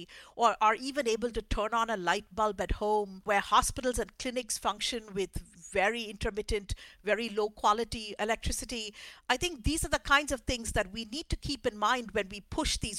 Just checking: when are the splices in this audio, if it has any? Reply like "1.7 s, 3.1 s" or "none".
3.2 s, 5.5 s, 8.1 s